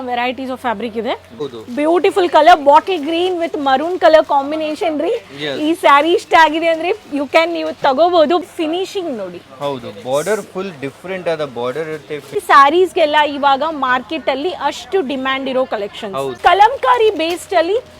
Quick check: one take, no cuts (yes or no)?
no